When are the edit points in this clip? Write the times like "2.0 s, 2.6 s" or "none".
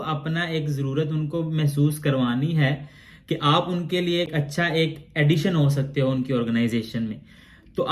4.3 s